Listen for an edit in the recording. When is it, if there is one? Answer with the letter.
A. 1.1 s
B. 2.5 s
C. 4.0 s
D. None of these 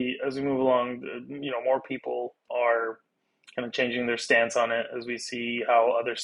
B